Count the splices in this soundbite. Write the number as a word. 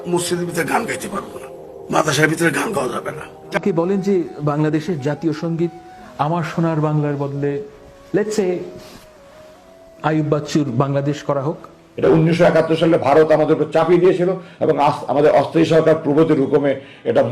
two